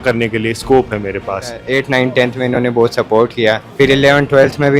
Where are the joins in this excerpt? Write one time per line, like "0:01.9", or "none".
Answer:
0:01.6
0:03.7